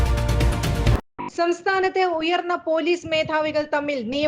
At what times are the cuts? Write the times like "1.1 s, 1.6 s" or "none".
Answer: 1.1 s